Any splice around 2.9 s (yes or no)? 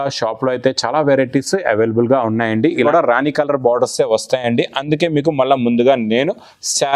yes